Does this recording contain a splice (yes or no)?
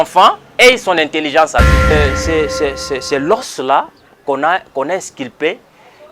yes